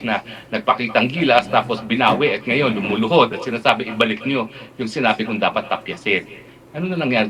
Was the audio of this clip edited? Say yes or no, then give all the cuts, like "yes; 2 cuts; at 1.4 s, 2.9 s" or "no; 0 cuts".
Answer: no; 0 cuts